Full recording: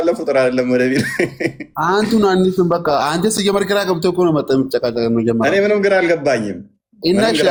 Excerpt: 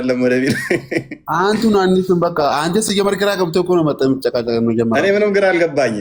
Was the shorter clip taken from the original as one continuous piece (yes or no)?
yes